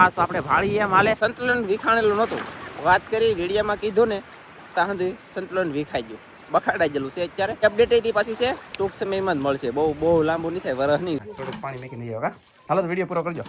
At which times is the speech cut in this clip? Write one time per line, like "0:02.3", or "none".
0:01.2
0:07.5
0:11.2